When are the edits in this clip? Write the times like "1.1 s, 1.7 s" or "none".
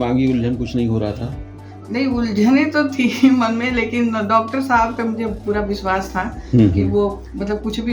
none